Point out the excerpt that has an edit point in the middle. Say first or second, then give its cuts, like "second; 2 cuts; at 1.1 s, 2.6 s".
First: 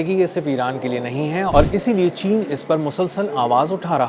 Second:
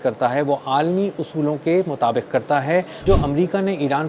second; 1 cut; at 3.0 s